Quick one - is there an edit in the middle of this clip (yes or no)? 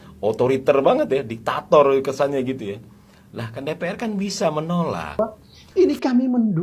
yes